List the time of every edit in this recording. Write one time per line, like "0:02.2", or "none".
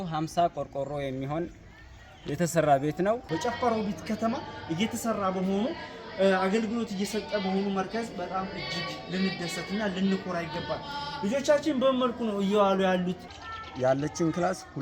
0:03.2
0:13.2